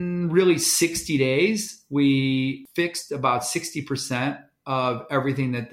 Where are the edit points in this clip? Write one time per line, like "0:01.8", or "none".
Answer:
0:02.6